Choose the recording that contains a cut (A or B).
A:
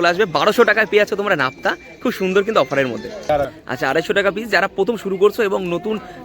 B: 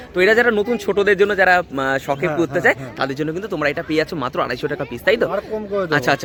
A